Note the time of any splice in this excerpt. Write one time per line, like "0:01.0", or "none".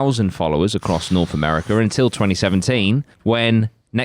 0:03.1